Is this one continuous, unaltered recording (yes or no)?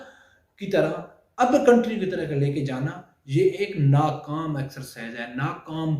yes